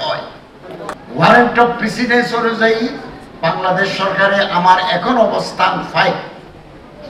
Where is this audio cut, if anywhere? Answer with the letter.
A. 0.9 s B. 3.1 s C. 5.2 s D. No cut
A